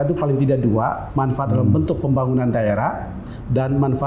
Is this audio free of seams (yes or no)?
yes